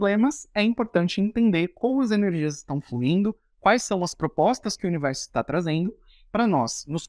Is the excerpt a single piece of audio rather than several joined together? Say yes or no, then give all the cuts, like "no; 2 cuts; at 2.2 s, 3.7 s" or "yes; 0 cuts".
yes; 0 cuts